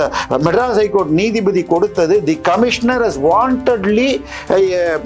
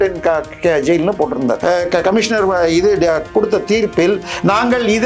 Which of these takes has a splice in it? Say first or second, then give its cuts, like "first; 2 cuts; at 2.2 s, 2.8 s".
second; 1 cut; at 1.6 s